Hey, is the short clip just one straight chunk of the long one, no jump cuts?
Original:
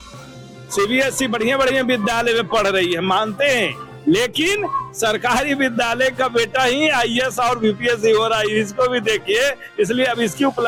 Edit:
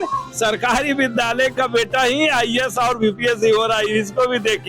yes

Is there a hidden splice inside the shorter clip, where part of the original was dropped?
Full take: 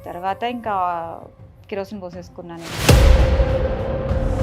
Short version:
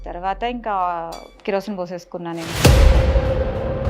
yes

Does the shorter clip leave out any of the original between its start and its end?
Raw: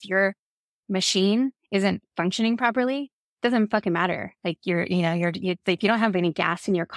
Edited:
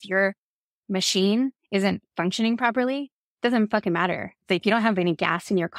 yes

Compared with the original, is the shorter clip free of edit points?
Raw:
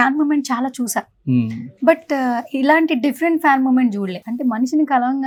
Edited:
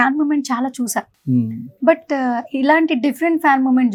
yes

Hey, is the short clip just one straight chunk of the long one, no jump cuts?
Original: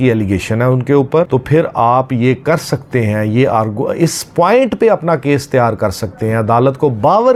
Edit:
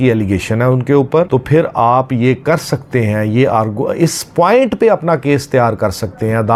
yes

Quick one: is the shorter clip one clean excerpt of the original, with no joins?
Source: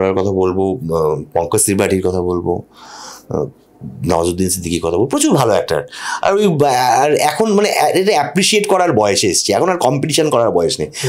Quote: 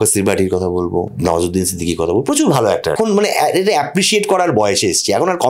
no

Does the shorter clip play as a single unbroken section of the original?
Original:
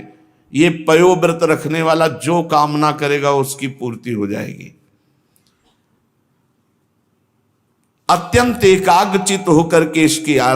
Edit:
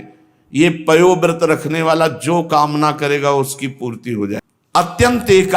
no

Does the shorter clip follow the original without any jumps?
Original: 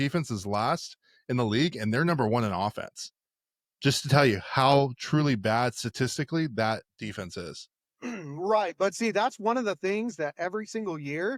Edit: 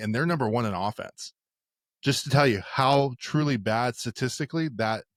yes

